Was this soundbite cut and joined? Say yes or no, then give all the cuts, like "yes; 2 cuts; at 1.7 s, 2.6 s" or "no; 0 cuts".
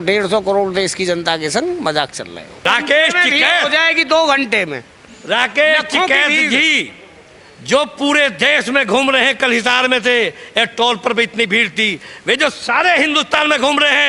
yes; 1 cut; at 2.6 s